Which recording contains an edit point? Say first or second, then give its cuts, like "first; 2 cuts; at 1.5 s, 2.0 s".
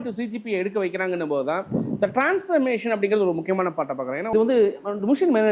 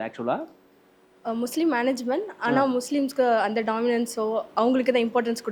first; 1 cut; at 4.2 s